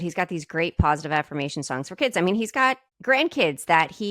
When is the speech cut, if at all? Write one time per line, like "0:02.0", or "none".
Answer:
0:02.9